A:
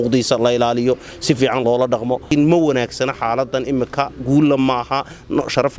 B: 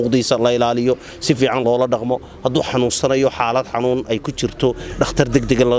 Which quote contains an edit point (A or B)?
A